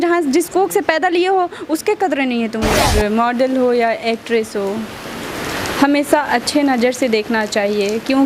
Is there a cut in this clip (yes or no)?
yes